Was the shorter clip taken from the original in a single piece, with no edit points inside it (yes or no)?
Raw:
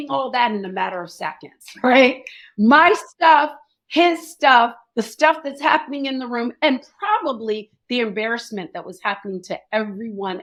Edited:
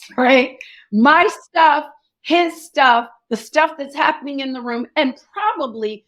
yes